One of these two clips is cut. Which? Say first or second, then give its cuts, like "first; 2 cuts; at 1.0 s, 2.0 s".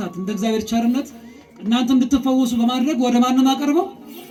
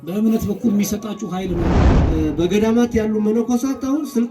second; 1 cut; at 1.7 s